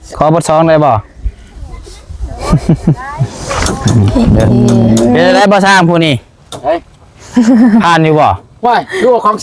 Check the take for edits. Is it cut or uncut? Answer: cut